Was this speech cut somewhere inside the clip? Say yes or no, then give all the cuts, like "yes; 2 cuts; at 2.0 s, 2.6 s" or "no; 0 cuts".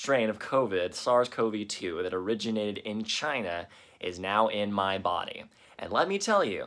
no; 0 cuts